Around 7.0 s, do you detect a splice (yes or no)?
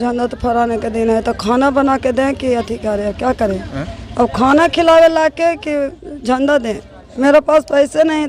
yes